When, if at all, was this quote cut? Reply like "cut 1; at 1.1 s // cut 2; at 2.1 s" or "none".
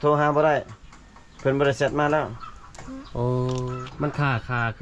cut 1; at 3.8 s